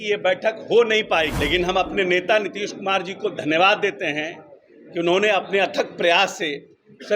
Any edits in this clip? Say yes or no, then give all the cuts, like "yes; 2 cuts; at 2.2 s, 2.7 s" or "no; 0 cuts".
yes; 1 cut; at 1.3 s